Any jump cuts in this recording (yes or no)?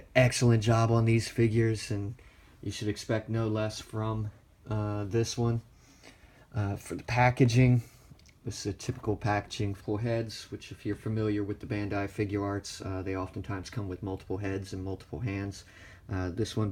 no